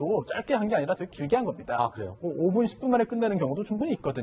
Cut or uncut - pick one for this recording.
uncut